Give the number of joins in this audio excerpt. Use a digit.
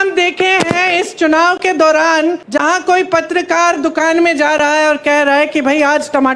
1